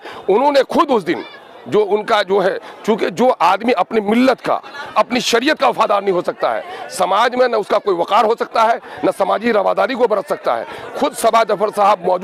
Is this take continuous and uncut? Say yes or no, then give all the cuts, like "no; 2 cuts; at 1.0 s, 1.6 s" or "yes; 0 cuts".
yes; 0 cuts